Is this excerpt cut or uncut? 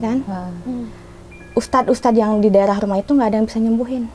cut